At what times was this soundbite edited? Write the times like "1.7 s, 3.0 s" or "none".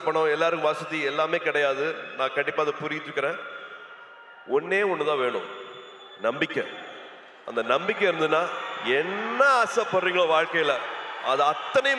none